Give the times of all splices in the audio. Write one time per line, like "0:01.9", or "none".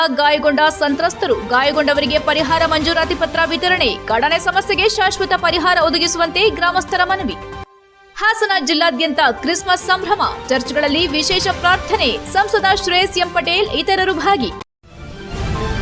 0:14.6